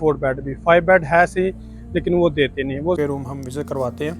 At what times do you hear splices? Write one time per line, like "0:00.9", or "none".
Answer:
0:03.0